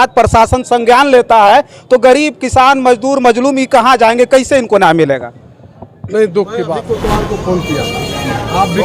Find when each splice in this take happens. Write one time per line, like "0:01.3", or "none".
0:06.9